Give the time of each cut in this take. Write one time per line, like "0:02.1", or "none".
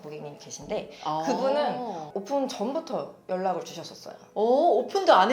0:02.1